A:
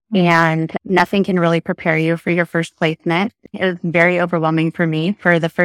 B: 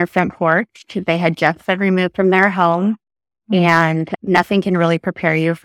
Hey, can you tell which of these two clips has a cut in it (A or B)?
A